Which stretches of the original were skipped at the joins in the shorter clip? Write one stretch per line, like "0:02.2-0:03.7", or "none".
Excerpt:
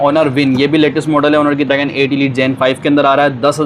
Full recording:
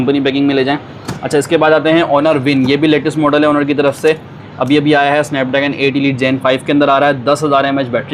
0:03.8-0:05.5